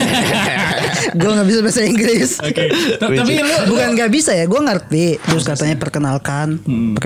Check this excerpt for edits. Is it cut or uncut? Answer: cut